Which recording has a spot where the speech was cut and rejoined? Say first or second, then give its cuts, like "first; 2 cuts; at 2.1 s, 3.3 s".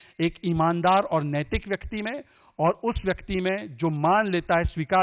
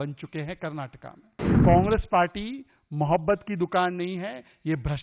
second; 1 cut; at 1.6 s